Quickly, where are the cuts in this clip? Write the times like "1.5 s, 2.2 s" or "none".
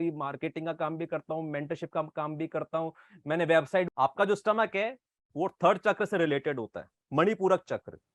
3.9 s

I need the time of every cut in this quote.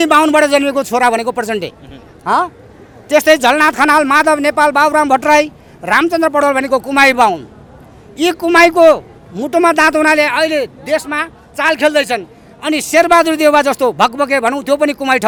none

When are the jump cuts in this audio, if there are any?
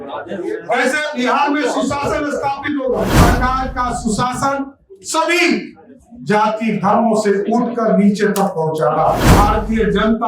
3.2 s, 9.4 s

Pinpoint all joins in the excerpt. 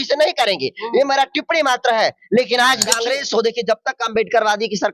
3.0 s

